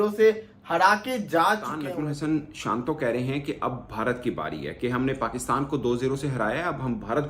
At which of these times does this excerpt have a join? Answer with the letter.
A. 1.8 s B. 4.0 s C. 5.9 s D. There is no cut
A